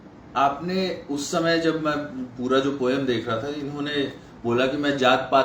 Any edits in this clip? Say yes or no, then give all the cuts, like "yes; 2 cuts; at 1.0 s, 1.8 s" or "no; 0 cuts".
no; 0 cuts